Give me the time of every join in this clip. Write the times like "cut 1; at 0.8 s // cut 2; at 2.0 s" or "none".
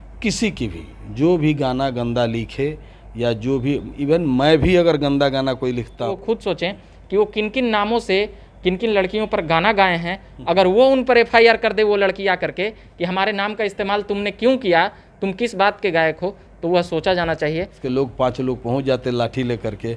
cut 1; at 6.2 s // cut 2; at 17.8 s